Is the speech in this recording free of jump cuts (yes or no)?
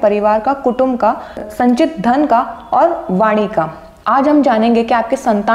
no